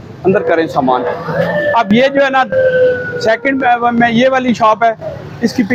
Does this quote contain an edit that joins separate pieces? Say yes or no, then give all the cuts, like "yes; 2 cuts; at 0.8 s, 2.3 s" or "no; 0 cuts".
no; 0 cuts